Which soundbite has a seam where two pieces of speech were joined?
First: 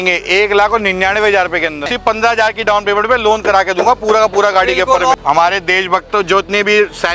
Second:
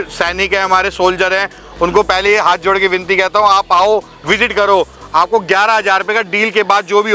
first; 2 cuts; at 1.8 s, 5.1 s

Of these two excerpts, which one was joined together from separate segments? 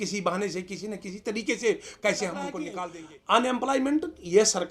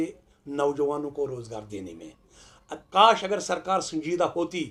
first; 1 cut; at 2.8 s

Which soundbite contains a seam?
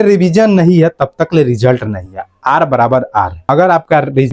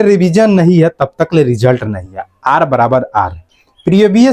second; 1 cut; at 3.4 s

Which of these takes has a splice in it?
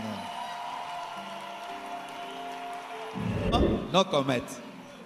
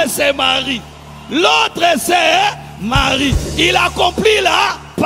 first; 1 cut; at 3.5 s

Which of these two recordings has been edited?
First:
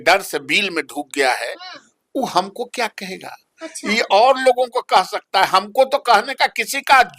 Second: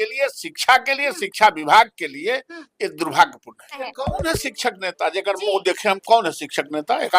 second; 1 cut; at 3.8 s

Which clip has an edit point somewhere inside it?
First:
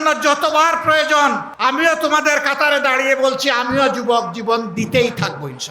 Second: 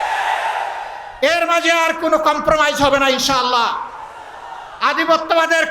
first; 1 cut; at 1.5 s

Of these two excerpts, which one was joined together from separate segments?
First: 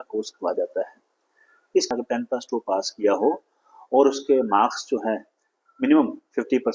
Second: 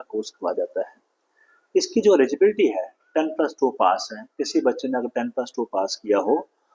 first; 1 cut; at 1.9 s

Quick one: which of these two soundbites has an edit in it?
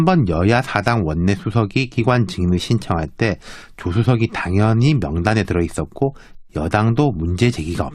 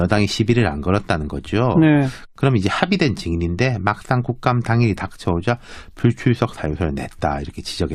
first; 1 cut; at 6.7 s

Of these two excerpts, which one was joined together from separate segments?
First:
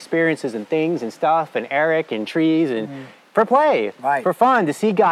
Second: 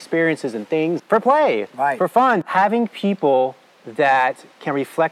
second; 2 cuts; at 1.0 s, 2.5 s

